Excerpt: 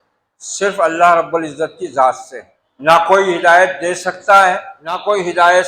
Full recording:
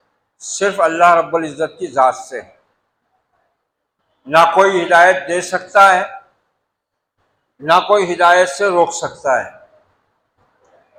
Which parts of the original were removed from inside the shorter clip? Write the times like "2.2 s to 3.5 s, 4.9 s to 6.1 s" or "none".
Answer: 2.2 s to 3.7 s, 5.9 s to 7.3 s